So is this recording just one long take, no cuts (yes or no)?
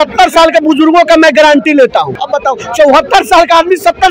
no